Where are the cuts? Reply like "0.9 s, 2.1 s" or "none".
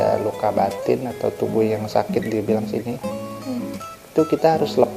none